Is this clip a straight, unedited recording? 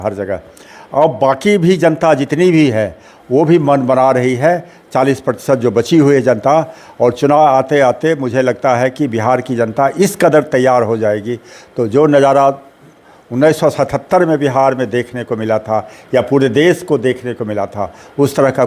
yes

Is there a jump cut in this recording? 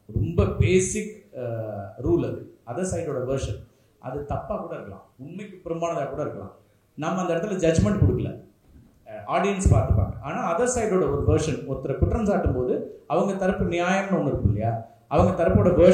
no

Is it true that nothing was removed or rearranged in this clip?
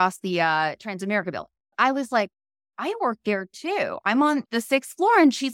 no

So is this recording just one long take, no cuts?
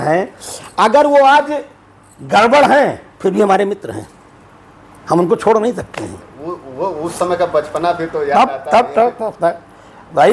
yes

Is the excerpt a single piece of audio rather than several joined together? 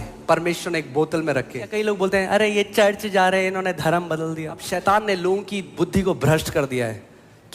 no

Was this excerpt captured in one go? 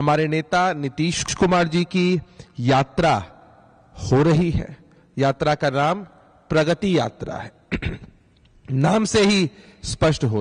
yes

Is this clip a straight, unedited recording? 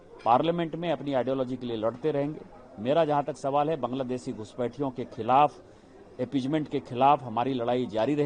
yes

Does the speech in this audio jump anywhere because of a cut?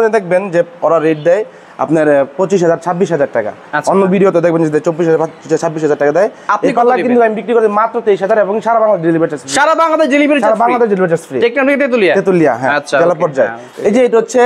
no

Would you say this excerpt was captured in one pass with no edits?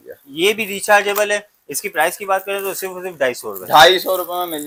yes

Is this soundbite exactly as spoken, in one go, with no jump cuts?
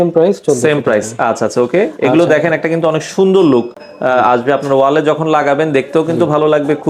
yes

